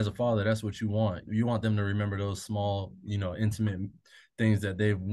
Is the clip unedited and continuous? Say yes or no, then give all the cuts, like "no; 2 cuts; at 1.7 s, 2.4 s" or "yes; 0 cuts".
no; 1 cut; at 1.2 s